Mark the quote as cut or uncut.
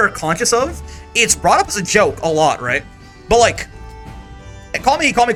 uncut